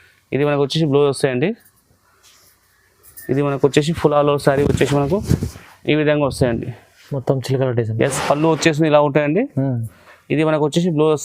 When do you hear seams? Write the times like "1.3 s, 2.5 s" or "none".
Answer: 8.1 s